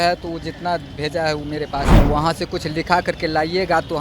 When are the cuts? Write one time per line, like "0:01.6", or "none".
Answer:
0:01.9